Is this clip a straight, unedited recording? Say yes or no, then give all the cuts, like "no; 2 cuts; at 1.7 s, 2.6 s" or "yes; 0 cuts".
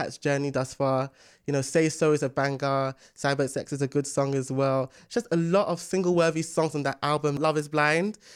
no; 1 cut; at 7.4 s